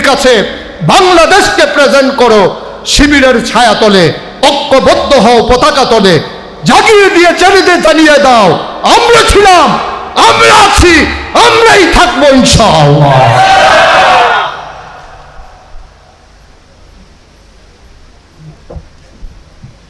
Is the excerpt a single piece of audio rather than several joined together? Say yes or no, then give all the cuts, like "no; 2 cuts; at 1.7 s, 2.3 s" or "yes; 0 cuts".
yes; 0 cuts